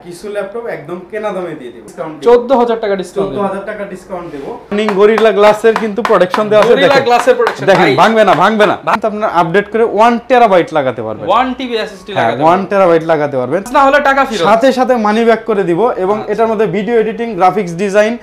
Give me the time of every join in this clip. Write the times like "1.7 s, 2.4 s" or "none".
1.8 s, 4.7 s, 9.0 s, 13.7 s